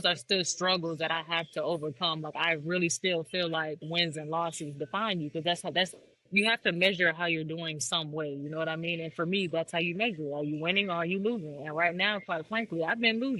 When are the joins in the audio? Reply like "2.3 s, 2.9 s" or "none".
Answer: none

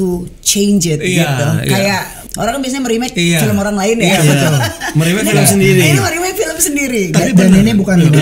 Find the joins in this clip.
2.2 s

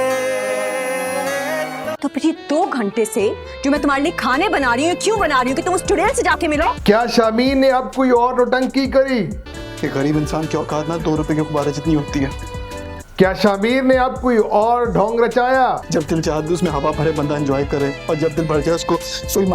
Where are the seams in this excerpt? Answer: 1.3 s

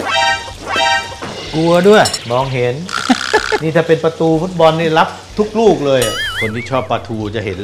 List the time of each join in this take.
2.2 s, 6.2 s

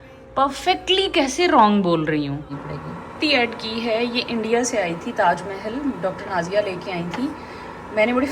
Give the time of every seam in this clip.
2.5 s

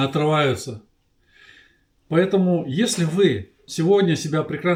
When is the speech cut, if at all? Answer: none

